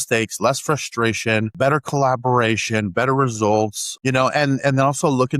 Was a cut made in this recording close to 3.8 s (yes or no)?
yes